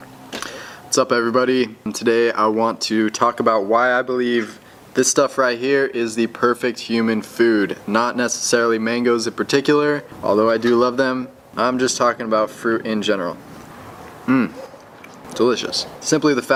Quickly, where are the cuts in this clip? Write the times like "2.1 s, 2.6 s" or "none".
none